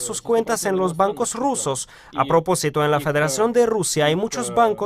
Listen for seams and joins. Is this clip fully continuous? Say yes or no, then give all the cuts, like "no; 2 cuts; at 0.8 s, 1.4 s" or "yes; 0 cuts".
yes; 0 cuts